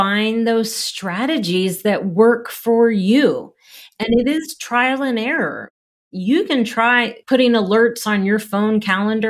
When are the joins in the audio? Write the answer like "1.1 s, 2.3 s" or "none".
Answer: 6.0 s, 7.1 s